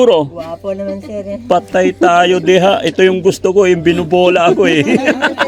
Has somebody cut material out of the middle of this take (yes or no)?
no